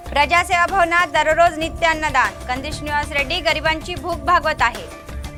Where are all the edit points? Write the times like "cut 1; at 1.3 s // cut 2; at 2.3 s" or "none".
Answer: none